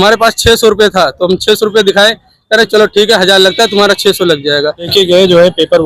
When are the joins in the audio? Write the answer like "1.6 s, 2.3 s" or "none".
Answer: 4.9 s